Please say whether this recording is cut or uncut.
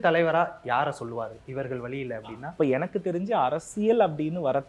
uncut